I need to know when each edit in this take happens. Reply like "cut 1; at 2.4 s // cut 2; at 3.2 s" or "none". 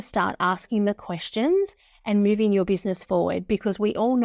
none